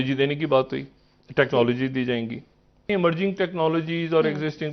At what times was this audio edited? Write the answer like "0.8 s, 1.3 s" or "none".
2.9 s